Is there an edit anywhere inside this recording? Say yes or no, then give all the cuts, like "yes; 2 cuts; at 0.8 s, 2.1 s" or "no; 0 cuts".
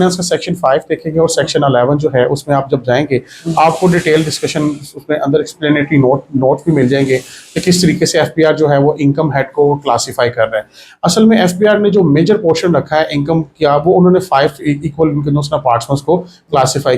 no; 0 cuts